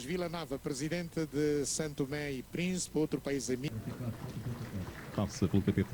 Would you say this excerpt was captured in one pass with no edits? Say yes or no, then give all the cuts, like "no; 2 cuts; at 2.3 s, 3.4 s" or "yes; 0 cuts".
no; 1 cut; at 3.7 s